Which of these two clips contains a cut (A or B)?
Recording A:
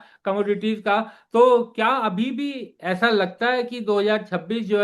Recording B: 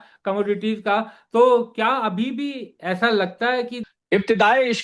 B